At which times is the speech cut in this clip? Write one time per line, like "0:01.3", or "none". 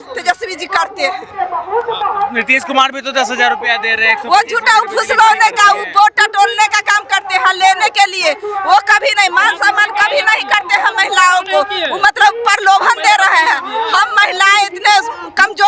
none